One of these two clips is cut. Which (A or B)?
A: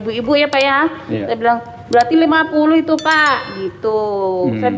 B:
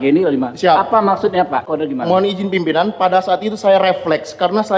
B